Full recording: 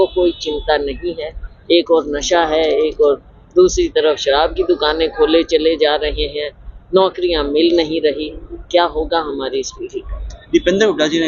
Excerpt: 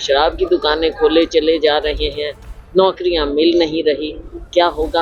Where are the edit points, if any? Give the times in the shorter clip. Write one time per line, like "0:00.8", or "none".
none

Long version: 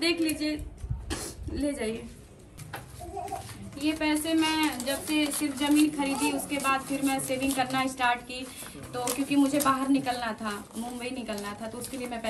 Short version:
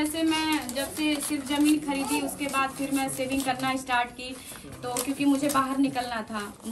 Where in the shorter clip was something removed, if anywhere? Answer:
none

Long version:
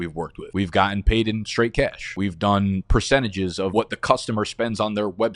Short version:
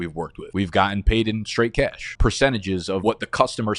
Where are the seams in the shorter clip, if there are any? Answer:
0:02.1

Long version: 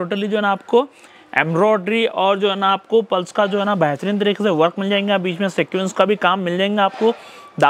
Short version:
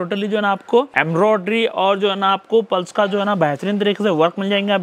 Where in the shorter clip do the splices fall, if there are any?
0:00.9

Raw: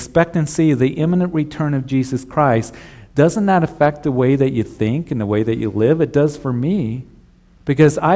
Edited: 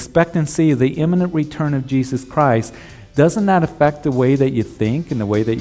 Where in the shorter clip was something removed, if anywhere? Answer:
none

